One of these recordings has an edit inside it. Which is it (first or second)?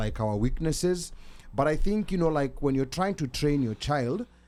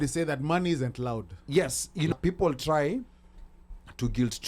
second